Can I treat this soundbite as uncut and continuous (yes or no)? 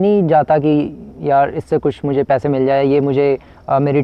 yes